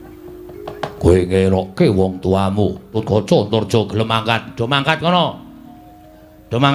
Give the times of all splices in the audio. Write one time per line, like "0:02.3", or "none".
0:03.0